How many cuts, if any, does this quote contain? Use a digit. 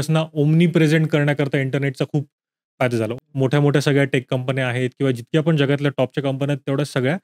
1